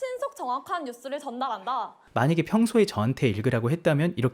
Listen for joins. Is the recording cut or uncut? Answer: cut